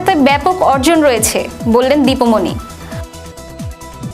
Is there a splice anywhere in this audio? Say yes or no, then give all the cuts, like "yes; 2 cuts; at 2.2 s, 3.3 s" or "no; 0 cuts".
yes; 1 cut; at 2.6 s